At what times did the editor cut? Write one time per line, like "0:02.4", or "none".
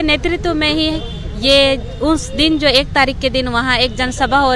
none

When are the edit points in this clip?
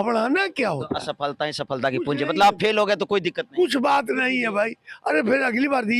none

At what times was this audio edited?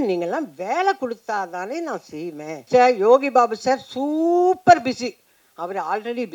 0:02.6

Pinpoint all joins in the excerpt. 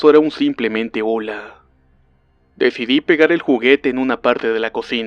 0:02.4

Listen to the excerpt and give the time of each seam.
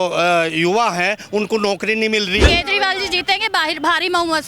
0:02.5

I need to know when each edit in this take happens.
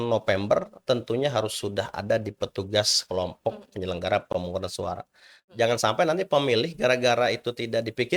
0:05.4

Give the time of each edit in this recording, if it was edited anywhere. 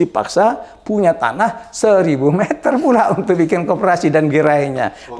none

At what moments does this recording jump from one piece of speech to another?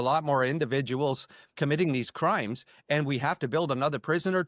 0:01.5

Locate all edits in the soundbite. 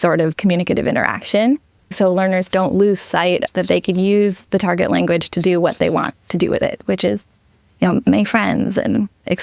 0:01.9
0:03.4

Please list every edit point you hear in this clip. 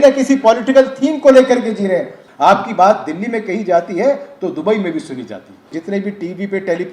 0:02.2
0:05.7

